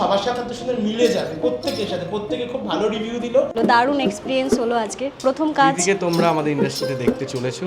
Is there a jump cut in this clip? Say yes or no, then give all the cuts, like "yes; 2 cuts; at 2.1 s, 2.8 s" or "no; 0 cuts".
yes; 1 cut; at 3.5 s